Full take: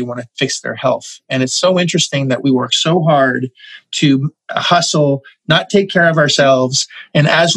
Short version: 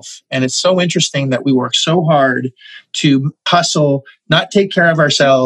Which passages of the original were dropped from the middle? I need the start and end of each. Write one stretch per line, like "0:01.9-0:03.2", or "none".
0:04.4-0:04.6